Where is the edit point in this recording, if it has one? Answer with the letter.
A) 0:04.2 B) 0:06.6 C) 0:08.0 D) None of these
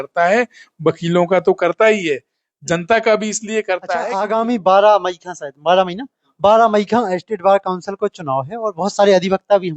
A